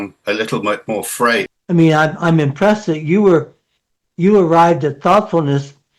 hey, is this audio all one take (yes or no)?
no